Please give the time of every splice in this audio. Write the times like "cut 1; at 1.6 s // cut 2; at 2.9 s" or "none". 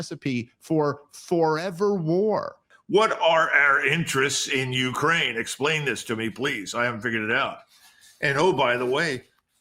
cut 1; at 2.7 s